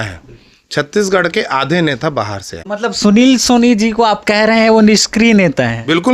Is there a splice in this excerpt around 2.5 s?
yes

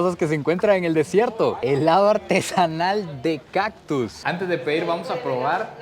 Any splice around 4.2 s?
no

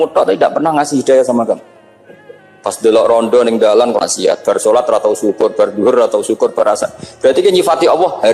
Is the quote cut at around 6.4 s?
no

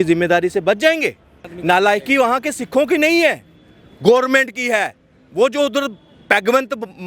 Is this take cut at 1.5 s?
yes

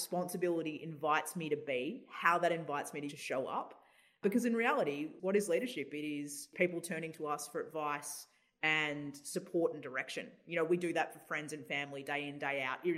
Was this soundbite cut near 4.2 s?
yes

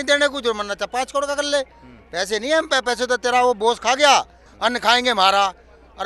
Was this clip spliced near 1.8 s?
no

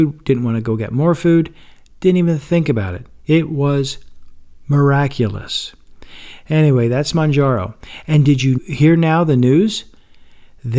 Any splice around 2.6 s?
no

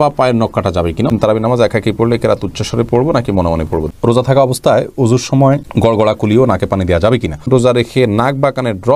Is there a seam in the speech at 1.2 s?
yes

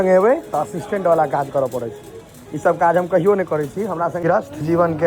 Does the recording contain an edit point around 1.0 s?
no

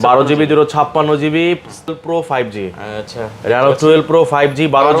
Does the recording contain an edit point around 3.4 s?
no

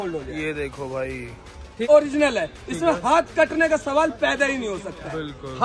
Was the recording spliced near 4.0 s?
no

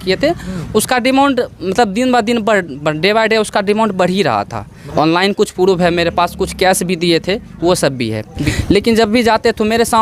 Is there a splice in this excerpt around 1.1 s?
no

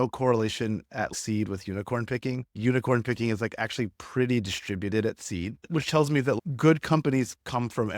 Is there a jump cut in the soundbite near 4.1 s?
no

